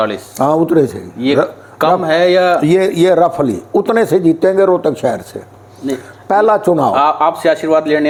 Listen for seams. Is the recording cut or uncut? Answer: uncut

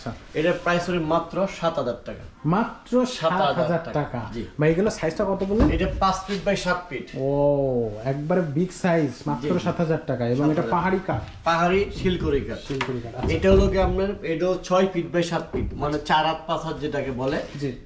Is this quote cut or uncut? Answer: uncut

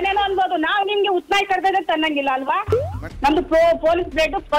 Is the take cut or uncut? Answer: cut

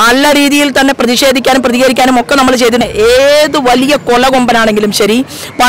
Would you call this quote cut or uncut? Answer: cut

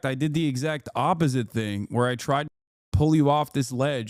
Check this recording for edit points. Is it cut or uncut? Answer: uncut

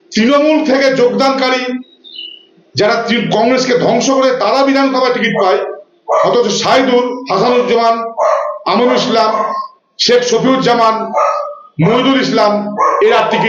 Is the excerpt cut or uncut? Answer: uncut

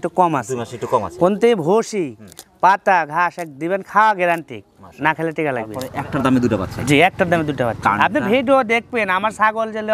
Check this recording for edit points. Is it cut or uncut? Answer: cut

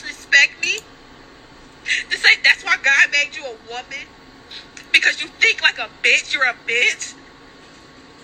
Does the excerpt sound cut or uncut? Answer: uncut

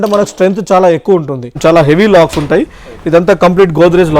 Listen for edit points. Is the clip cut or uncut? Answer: cut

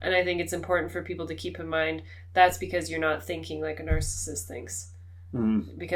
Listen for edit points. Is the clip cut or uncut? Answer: uncut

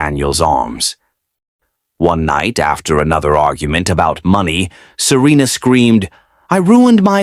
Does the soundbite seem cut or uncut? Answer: cut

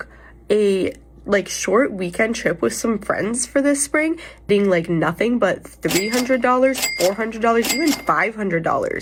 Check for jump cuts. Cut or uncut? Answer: uncut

